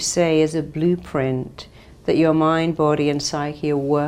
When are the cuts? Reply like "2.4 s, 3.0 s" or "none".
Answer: none